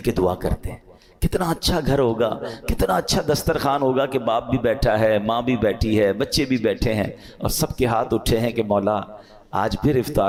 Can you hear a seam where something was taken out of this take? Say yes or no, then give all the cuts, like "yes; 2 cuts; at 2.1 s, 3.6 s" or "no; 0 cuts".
no; 0 cuts